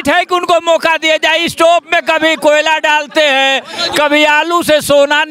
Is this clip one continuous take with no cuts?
yes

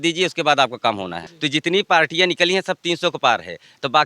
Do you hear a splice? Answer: yes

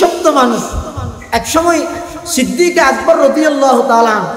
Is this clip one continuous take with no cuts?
yes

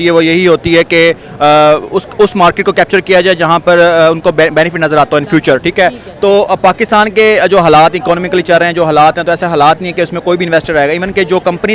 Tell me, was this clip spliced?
no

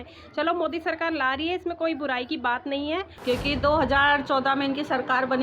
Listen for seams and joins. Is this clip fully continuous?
no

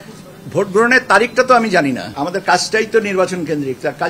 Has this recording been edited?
yes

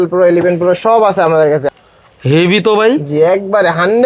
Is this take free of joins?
no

